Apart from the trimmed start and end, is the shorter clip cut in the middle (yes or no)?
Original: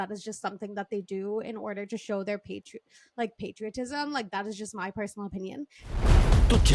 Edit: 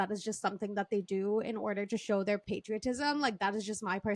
yes